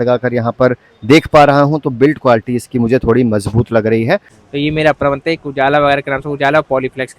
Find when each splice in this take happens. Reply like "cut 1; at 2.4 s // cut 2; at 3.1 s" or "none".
cut 1; at 4.4 s